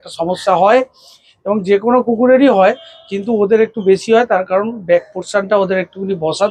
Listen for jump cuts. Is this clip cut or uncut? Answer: uncut